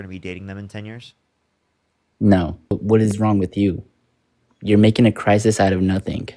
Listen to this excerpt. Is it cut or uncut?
cut